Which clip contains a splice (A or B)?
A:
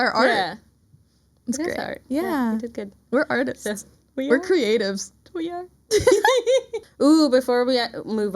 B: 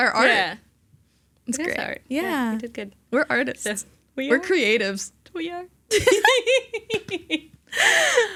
A